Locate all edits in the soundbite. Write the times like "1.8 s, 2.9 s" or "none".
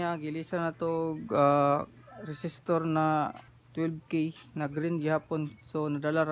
none